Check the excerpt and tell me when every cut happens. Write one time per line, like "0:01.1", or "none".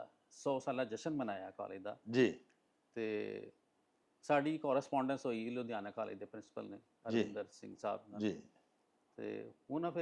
none